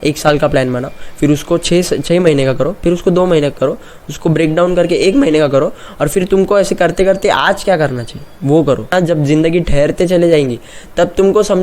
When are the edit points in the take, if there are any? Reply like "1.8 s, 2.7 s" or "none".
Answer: 8.9 s